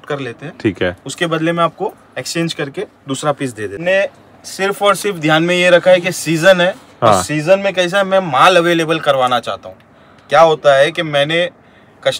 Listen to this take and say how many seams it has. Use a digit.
1